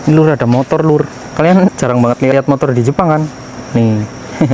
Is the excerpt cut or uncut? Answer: cut